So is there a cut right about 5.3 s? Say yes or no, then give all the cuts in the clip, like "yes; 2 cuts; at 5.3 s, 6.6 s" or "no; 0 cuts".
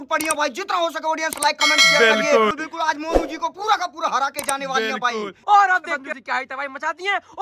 yes; 2 cuts; at 2.5 s, 5.3 s